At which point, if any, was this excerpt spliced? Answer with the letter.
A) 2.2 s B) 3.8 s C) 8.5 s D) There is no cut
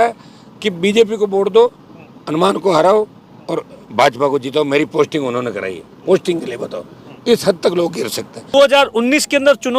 C